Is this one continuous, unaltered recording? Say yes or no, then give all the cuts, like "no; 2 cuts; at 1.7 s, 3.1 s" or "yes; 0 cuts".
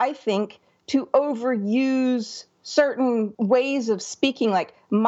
no; 1 cut; at 3.3 s